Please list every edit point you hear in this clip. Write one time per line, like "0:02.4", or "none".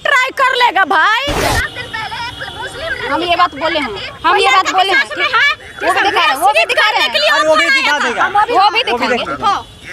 0:01.5